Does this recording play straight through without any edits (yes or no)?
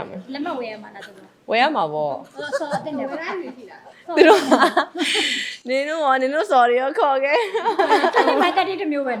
yes